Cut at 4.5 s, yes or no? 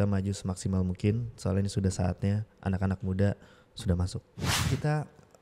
yes